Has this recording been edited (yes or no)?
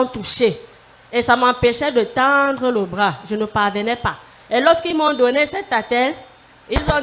yes